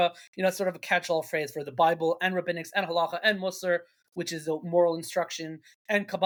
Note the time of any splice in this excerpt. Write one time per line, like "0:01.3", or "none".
none